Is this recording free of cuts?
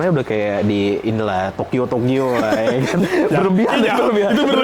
yes; 0 cuts

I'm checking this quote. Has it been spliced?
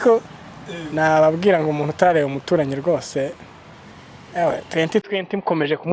no; 0 cuts

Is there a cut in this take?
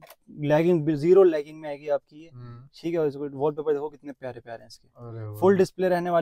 no; 0 cuts

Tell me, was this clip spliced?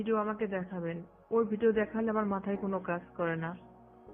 no; 0 cuts

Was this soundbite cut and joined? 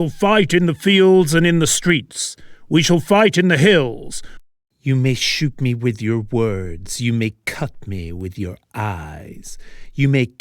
yes; 1 cut; at 4.1 s

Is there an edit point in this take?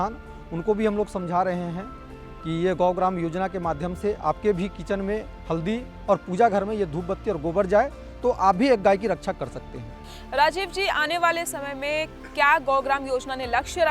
no; 0 cuts

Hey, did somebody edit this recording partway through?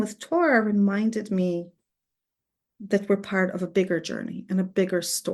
no; 0 cuts

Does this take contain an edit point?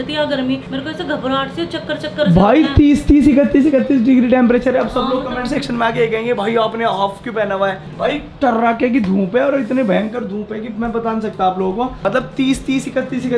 no; 0 cuts

